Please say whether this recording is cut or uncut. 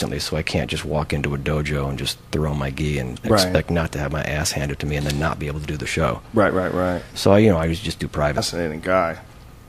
uncut